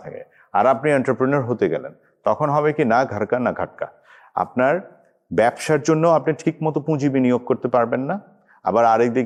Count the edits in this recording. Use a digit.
0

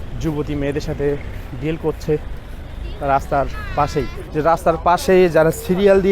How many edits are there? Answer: 1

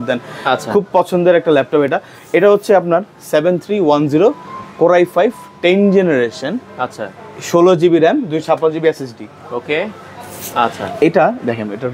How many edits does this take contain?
0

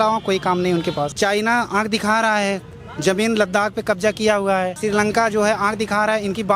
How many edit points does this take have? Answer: 2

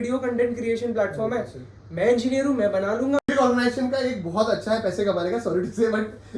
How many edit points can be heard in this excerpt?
1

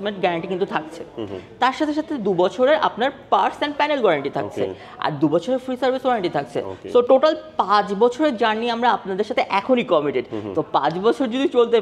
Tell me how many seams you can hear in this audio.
0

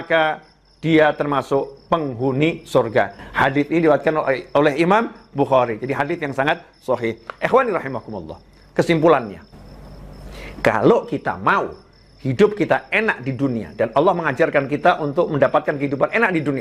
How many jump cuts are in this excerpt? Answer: 0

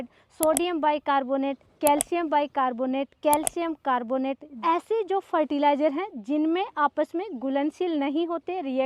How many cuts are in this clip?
0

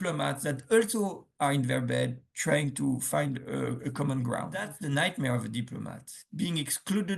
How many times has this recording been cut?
1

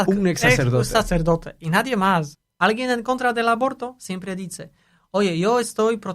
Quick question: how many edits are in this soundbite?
1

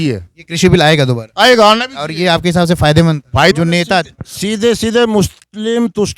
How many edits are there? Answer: 1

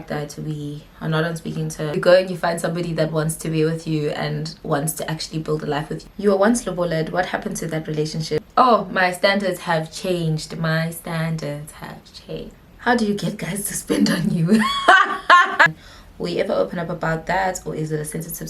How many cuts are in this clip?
5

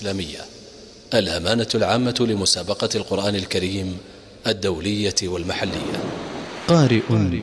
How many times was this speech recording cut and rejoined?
1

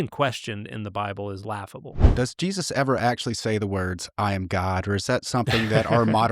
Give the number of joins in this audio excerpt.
1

